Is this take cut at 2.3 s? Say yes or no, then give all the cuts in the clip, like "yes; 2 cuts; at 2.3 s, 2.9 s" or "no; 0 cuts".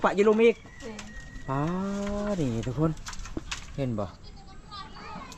no; 0 cuts